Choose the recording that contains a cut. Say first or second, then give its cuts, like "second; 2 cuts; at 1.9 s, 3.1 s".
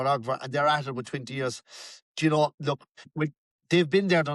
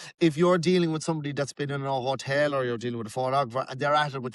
first; 1 cut; at 3.2 s